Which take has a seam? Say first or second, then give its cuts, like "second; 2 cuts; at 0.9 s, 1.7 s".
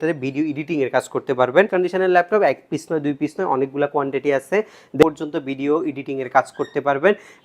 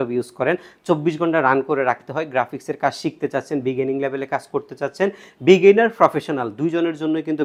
first; 2 cuts; at 1.7 s, 5.0 s